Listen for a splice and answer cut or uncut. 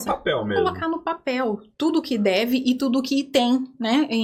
uncut